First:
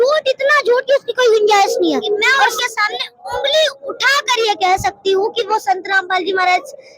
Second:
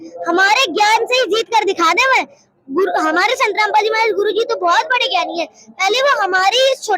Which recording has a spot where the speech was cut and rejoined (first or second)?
first